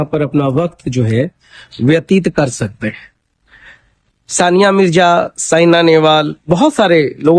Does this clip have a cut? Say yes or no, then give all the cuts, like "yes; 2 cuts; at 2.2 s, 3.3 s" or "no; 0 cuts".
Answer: no; 0 cuts